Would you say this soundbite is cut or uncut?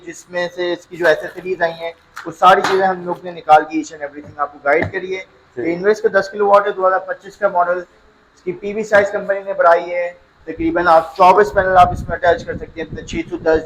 uncut